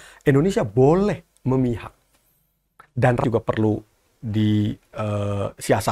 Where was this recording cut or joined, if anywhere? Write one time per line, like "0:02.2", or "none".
0:03.2